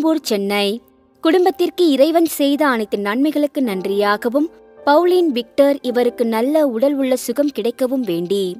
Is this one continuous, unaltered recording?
yes; 0 cuts

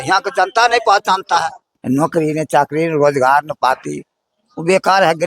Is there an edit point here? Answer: yes; 1 cut; at 1.7 s

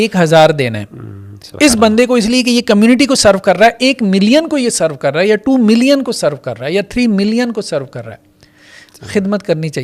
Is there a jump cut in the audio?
no; 0 cuts

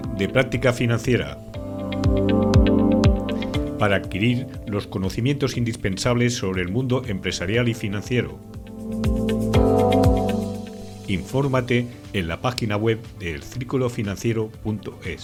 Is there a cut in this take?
no; 0 cuts

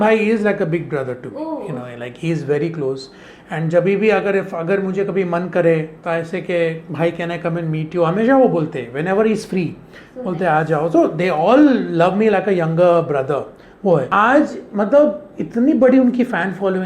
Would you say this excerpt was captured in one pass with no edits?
no; 2 cuts; at 2.0 s, 14.1 s

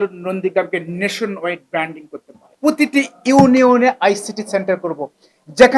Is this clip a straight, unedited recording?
no; 1 cut; at 2.4 s

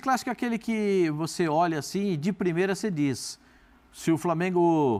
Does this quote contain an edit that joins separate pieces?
no; 0 cuts

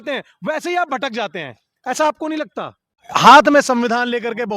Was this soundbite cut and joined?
yes; 1 cut; at 3.0 s

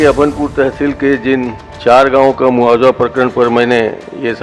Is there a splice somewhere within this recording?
yes; 1 cut; at 1.6 s

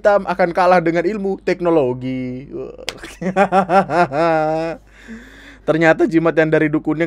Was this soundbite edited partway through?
no; 0 cuts

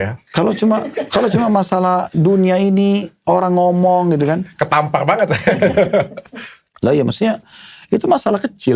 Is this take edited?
no; 0 cuts

